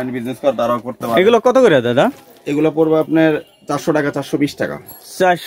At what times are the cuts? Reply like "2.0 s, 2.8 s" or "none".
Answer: none